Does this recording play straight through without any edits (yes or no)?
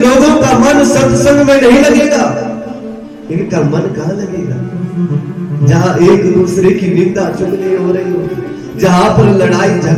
yes